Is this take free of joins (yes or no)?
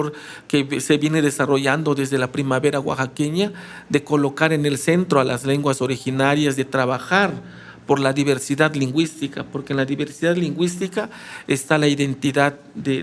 yes